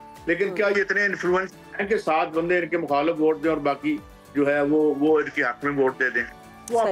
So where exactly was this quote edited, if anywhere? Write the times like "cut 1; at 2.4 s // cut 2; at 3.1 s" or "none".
none